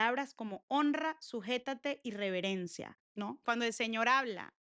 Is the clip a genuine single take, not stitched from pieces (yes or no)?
no